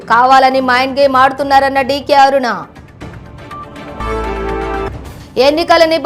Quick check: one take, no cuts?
no; 1 cut; at 4.9 s

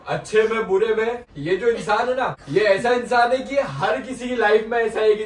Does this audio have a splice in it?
yes; 2 cuts; at 1.3 s, 2.4 s

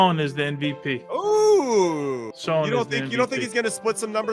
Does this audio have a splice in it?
yes; 1 cut; at 2.3 s

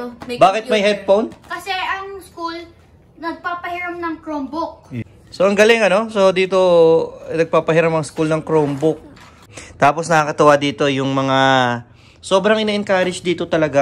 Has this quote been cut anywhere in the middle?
no; 0 cuts

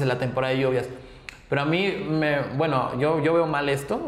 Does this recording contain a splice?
no; 0 cuts

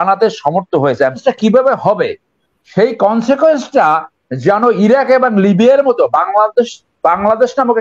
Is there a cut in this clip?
yes; 1 cut; at 1.2 s

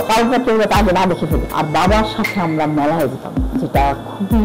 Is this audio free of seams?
no; 1 cut; at 1.4 s

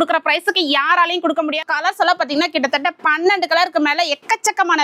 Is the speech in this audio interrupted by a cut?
yes; 1 cut; at 1.6 s

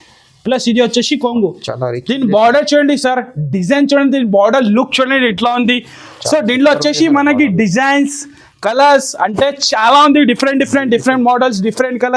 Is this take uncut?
yes; 0 cuts

